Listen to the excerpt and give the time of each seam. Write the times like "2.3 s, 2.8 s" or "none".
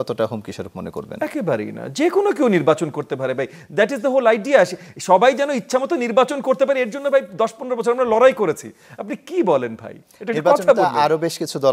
none